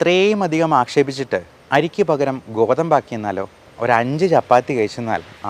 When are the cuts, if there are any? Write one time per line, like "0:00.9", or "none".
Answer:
0:03.6